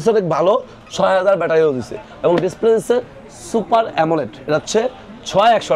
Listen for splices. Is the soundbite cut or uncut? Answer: uncut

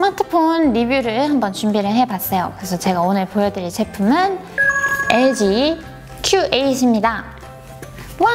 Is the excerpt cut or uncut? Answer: uncut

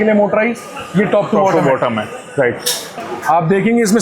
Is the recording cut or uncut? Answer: cut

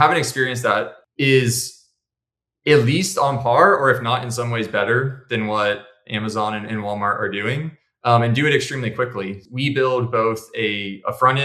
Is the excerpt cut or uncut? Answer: cut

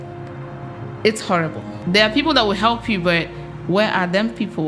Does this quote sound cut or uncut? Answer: cut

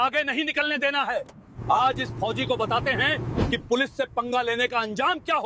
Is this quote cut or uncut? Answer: uncut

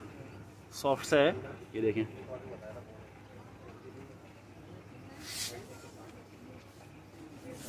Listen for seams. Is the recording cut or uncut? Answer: uncut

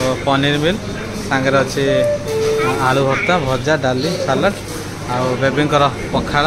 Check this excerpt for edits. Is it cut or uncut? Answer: uncut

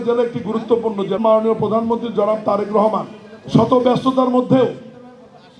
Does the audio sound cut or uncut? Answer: cut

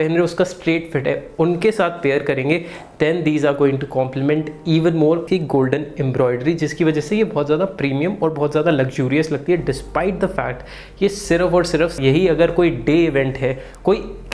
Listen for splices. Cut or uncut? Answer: cut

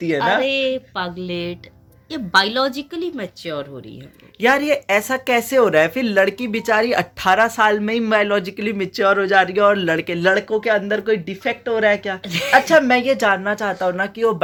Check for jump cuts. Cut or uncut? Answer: uncut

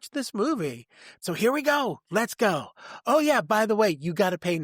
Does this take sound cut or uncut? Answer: cut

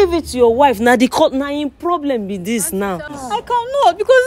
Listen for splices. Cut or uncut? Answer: cut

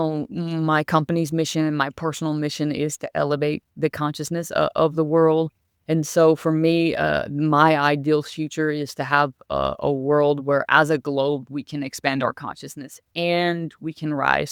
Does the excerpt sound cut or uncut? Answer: uncut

